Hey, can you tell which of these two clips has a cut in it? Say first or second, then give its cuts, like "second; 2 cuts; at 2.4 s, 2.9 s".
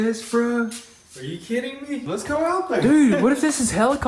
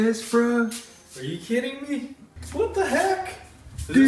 first; 1 cut; at 2.0 s